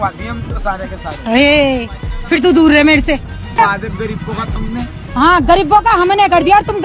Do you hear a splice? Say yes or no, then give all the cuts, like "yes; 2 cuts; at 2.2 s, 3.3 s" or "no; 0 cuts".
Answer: yes; 1 cut; at 3.6 s